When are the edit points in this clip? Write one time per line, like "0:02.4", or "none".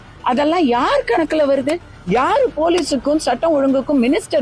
none